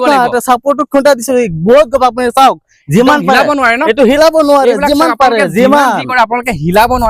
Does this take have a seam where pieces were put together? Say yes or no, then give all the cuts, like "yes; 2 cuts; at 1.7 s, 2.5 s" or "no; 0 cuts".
no; 0 cuts